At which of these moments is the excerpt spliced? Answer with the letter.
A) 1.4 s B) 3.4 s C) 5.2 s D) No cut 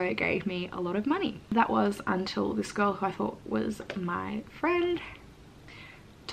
A